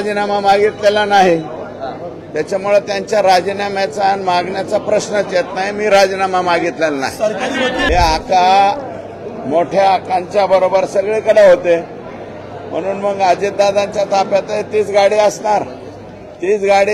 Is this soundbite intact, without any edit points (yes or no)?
no